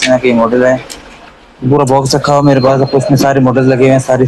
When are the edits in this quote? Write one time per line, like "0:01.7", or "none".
none